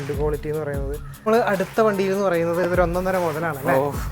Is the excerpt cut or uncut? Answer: cut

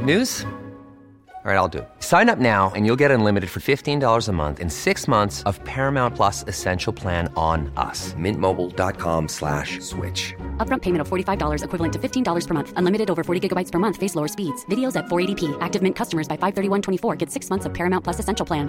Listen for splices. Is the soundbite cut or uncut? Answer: uncut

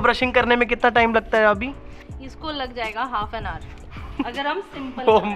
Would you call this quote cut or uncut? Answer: uncut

